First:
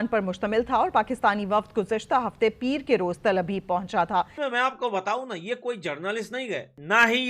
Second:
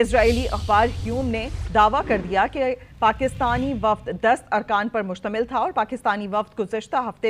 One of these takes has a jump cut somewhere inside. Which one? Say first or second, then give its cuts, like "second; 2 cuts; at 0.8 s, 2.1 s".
first; 1 cut; at 4.4 s